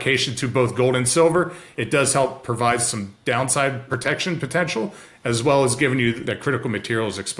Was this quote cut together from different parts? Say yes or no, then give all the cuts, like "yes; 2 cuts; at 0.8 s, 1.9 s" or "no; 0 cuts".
yes; 2 cuts; at 3.9 s, 6.2 s